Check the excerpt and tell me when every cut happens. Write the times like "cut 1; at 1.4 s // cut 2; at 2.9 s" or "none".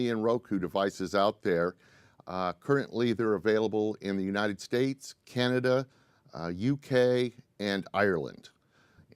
cut 1; at 4.2 s